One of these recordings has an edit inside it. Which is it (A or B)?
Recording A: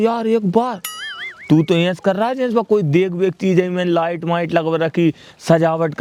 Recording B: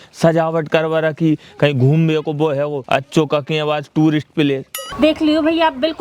B